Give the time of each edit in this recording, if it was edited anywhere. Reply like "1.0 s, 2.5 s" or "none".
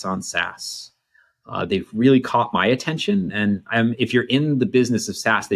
none